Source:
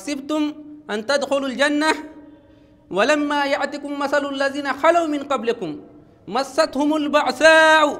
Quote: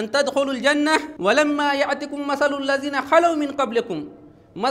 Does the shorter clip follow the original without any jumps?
no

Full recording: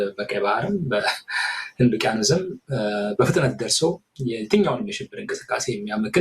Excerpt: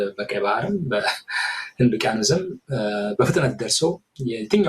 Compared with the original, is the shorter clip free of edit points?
yes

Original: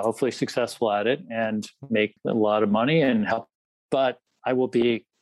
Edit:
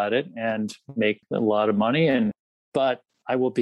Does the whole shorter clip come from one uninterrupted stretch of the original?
no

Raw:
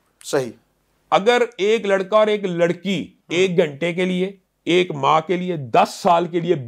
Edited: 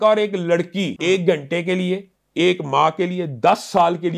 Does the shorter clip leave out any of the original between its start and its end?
yes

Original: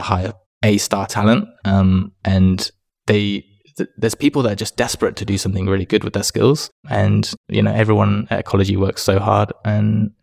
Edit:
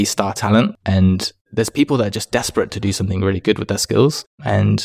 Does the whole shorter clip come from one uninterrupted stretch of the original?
no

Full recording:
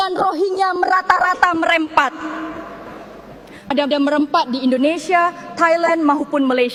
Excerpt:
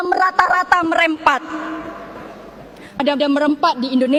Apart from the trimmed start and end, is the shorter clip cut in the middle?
no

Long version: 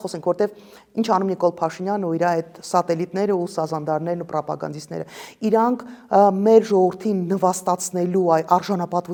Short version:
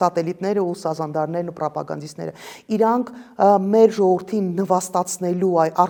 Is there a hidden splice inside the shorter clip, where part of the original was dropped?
no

